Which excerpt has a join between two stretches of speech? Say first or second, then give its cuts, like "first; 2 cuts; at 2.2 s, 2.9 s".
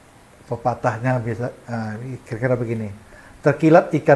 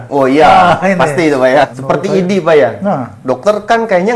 second; 1 cut; at 1.8 s